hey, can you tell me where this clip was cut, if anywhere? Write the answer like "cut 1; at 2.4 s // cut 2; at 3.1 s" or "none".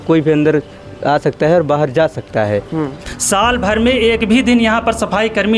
cut 1; at 3.1 s